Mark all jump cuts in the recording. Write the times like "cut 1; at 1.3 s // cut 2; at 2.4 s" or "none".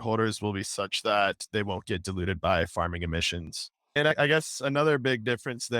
cut 1; at 3.9 s